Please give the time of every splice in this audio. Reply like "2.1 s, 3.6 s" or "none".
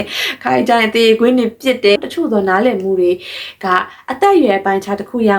2.0 s